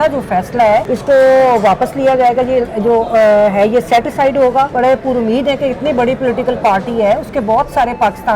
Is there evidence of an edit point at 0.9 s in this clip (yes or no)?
yes